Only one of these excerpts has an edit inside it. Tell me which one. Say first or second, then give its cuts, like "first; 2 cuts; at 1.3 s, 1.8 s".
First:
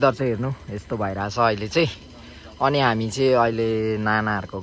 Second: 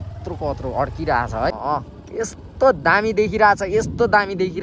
second; 1 cut; at 1.5 s